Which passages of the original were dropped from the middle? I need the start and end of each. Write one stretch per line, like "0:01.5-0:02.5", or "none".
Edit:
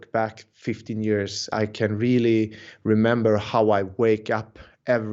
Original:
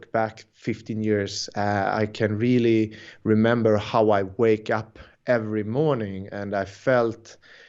0:01.5-0:01.9

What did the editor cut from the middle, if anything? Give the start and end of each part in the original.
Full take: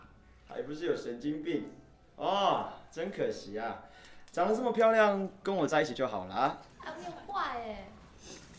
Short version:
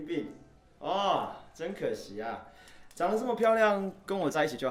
none

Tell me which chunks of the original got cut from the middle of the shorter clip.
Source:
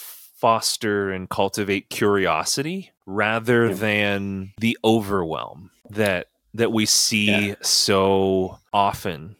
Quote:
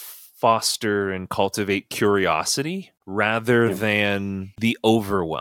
none

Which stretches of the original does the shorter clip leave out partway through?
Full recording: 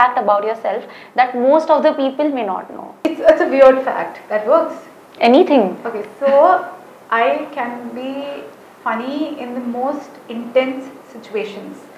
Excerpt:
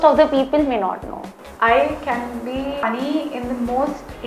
0:02.9-0:06.7
0:08.3-0:08.9

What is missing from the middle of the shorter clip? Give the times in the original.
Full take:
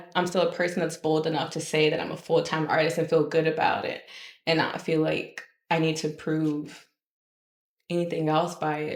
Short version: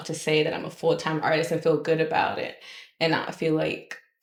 none

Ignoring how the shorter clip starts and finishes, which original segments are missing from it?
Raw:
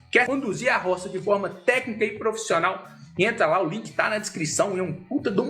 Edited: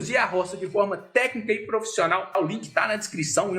0:02.9-0:03.6

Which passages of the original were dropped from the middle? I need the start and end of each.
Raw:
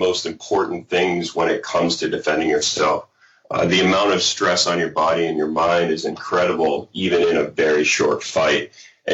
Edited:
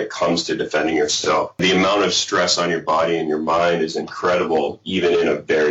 0:03.1-0:03.7

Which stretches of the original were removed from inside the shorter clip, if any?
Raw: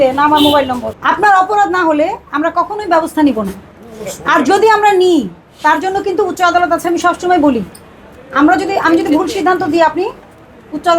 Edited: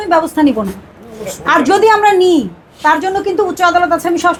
none

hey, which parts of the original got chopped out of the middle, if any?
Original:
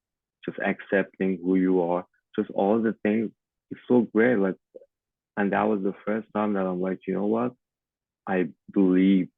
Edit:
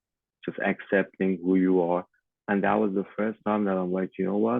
0:02.2-0:05.1

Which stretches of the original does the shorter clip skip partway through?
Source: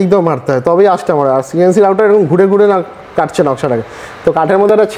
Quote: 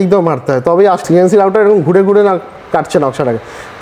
0:01.0-0:01.5

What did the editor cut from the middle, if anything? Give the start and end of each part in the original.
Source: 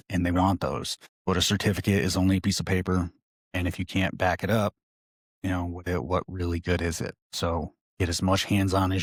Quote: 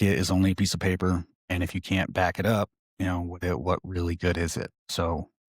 0:03.2-0:03.4
0:04.9-0:05.3

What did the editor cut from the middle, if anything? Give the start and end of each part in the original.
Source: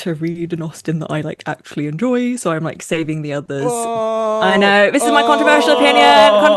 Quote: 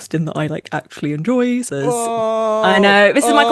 0:02.4-0:03.4

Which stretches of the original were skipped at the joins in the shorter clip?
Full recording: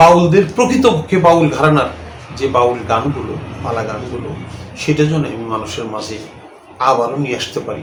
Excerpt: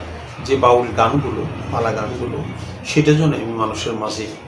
none

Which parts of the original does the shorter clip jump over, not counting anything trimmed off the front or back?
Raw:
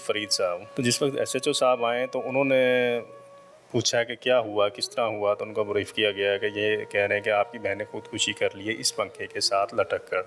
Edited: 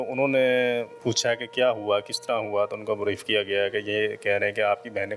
0:03.1-0:03.6

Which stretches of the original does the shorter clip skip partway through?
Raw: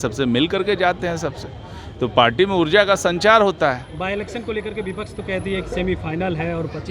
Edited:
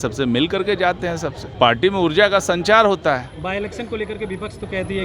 0:01.5-0:02.1

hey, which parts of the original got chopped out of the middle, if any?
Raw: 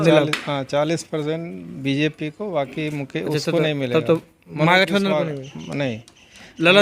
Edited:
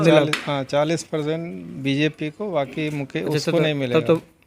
none

